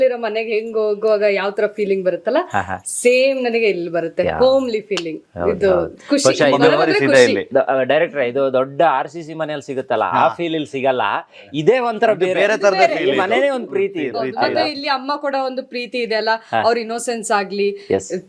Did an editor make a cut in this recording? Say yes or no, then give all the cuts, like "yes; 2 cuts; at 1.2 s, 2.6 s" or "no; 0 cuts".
no; 0 cuts